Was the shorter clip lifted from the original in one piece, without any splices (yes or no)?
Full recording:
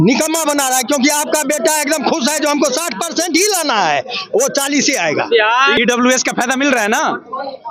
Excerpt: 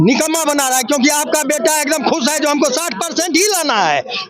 yes